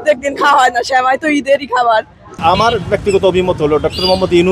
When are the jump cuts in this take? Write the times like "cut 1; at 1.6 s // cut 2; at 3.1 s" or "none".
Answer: cut 1; at 2.2 s